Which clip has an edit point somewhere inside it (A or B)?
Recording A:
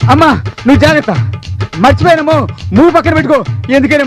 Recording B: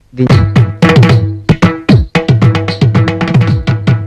B